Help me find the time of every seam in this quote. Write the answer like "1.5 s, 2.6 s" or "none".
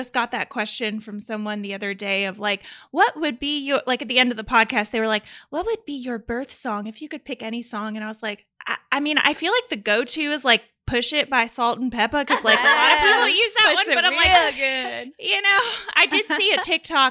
none